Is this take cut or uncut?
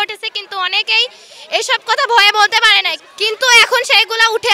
cut